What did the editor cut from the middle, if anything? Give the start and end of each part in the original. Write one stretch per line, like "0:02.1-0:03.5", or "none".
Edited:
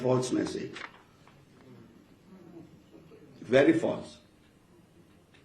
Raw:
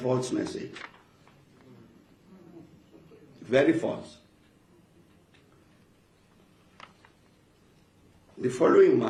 none